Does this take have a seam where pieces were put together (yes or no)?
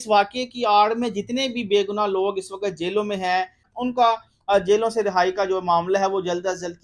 yes